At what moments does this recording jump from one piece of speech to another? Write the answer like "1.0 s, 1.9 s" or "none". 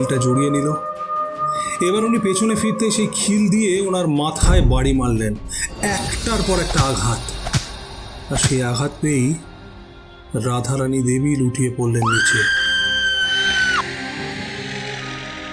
none